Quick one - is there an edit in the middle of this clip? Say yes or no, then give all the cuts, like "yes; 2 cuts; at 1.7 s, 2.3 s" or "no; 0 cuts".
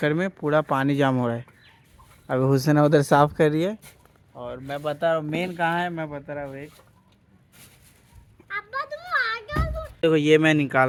no; 0 cuts